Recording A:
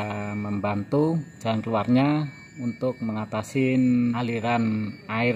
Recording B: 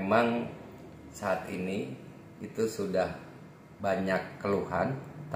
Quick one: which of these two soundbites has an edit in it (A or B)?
A